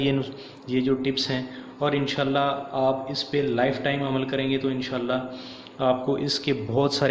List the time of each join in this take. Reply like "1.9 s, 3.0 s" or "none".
1.8 s

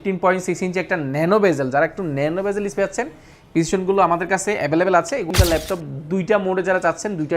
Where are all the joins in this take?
5.3 s

